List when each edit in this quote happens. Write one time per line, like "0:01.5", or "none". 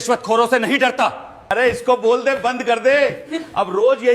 0:01.5